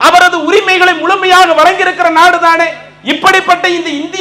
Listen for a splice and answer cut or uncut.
uncut